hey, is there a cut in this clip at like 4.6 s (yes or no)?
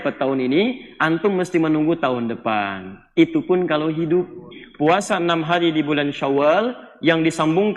yes